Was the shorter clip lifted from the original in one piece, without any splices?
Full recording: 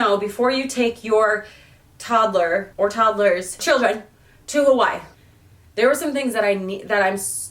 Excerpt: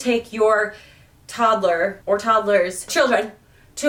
yes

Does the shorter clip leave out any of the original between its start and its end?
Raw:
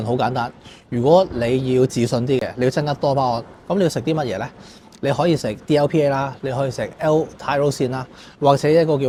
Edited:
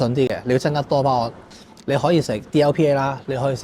yes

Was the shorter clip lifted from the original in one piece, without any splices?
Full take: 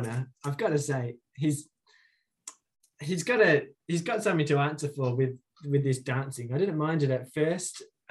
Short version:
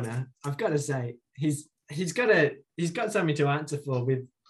no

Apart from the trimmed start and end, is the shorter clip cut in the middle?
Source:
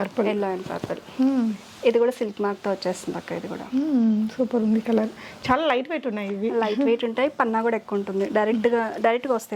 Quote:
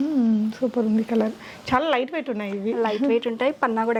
no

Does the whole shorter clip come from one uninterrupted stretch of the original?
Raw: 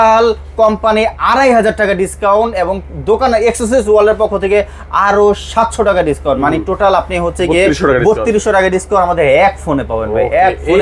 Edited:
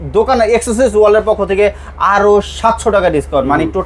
yes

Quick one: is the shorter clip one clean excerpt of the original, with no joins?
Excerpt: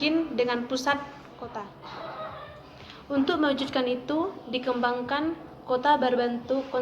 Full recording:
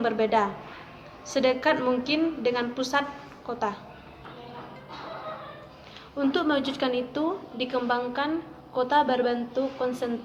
no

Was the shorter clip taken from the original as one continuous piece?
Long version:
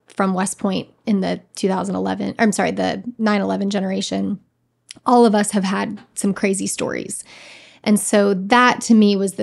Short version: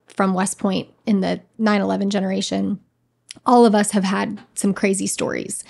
no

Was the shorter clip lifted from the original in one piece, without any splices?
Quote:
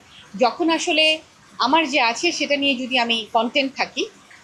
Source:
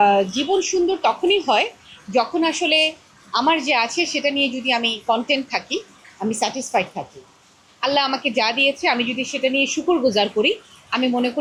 yes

